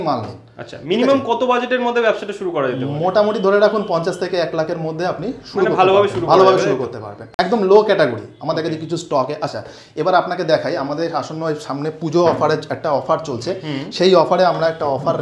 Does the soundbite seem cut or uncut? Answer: uncut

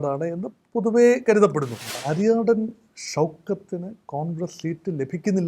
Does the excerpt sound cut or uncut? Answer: cut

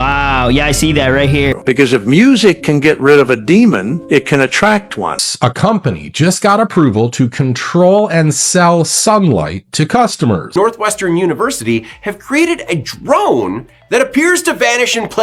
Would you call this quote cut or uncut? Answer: cut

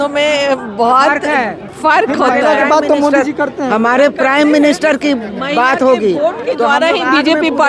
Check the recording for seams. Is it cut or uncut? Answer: uncut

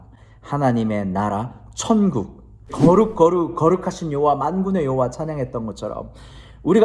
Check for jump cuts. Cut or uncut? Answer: cut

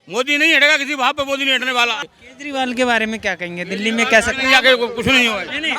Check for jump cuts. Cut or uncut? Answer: cut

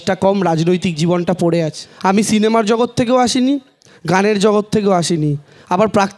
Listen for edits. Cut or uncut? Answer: cut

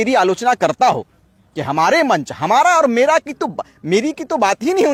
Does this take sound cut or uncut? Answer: uncut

